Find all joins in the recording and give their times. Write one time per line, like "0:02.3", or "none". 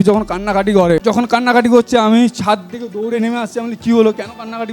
0:01.0